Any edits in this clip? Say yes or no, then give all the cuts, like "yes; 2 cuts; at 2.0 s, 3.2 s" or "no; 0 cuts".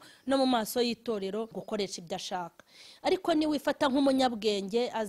yes; 1 cut; at 1.6 s